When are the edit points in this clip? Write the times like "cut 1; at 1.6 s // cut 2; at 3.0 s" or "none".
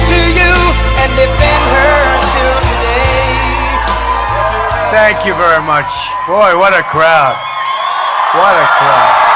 none